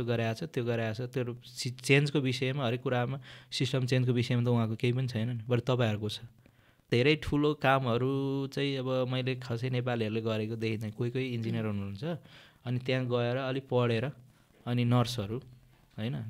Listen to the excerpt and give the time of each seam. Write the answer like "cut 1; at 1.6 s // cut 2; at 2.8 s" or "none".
cut 1; at 6.9 s